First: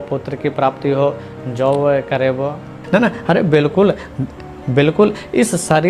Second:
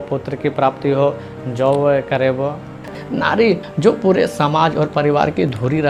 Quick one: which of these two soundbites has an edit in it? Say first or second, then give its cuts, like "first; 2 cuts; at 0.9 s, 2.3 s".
second; 1 cut; at 2.9 s